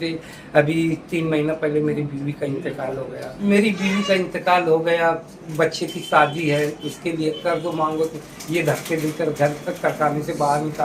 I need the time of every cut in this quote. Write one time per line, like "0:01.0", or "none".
0:03.3